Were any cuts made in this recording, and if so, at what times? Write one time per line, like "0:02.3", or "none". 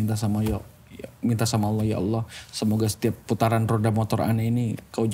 none